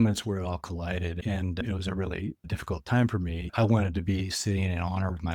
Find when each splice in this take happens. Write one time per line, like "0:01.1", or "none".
0:01.5
0:02.5
0:03.5